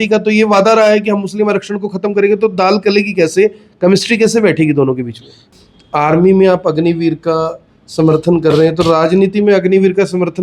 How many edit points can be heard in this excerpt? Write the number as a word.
one